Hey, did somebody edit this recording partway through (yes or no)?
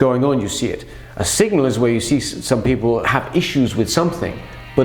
yes